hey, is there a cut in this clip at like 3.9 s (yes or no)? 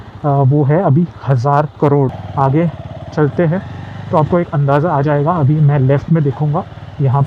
no